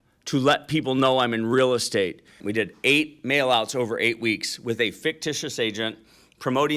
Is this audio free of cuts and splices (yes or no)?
no